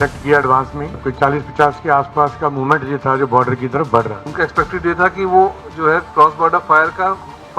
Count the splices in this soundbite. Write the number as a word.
two